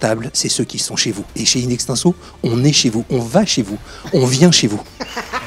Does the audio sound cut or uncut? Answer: uncut